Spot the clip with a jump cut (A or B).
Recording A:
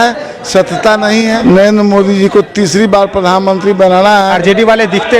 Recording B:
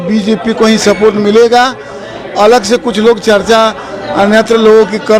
A